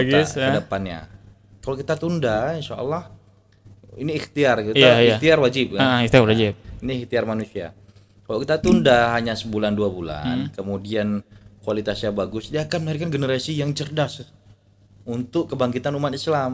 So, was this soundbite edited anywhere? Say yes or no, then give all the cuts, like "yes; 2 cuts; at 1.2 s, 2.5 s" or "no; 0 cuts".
no; 0 cuts